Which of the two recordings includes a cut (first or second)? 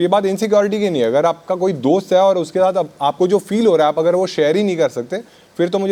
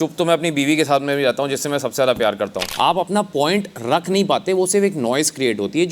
second